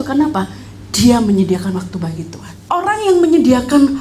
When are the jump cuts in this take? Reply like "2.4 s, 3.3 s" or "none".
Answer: 2.7 s